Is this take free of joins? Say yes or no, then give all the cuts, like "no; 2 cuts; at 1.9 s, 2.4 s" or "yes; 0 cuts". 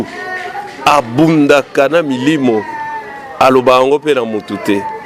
yes; 0 cuts